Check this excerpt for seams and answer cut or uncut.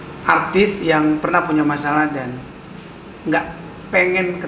uncut